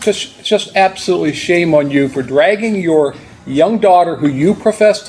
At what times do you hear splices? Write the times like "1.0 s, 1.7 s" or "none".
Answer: none